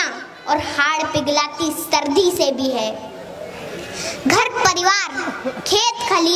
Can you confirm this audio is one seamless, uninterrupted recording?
yes; 0 cuts

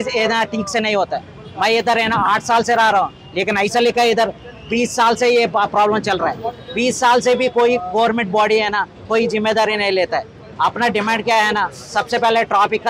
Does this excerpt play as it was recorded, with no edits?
yes; 0 cuts

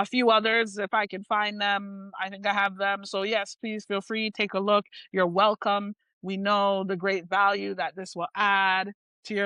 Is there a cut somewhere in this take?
no; 0 cuts

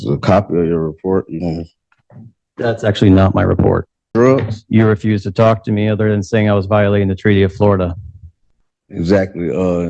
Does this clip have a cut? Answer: yes; 1 cut; at 4.1 s

